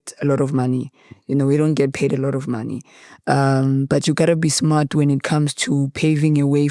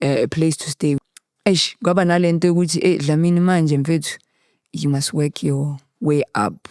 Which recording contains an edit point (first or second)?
second